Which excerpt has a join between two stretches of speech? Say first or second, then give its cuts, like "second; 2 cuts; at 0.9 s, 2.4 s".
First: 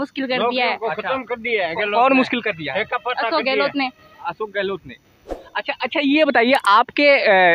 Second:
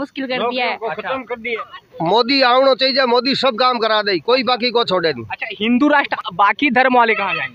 second; 2 cuts; at 1.6 s, 6.1 s